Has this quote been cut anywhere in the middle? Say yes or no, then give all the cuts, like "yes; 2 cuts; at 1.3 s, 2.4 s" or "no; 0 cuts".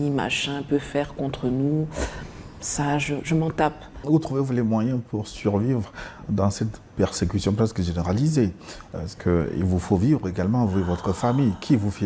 yes; 1 cut; at 3.9 s